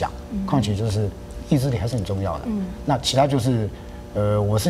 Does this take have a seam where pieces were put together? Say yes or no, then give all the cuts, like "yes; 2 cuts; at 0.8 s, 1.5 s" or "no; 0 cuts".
yes; 1 cut; at 1.3 s